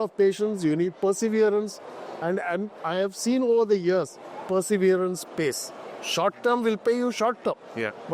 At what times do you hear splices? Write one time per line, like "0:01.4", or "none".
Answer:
none

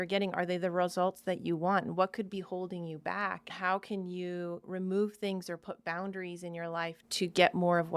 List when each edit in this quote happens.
0:03.5
0:04.6
0:07.0

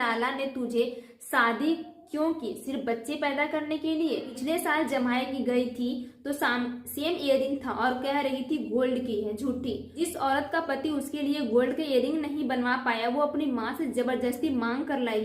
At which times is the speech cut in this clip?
0:04.3
0:09.9

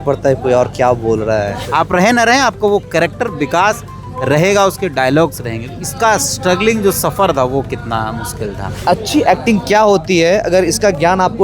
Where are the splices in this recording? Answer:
0:01.6
0:08.7

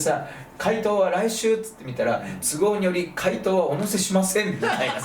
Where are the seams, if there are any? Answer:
none

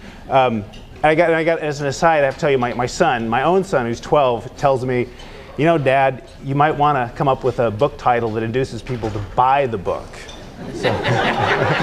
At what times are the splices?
0:09.2

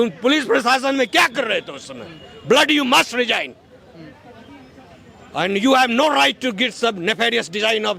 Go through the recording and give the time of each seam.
none

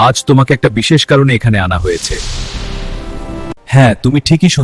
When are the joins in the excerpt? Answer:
0:03.6

